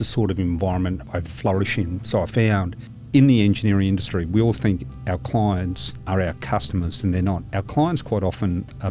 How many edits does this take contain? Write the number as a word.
three